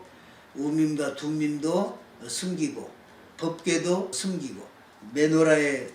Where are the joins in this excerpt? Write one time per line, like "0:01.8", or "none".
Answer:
0:03.2
0:04.4